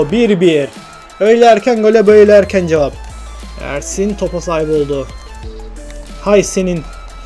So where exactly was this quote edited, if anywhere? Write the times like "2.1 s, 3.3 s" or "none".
3.1 s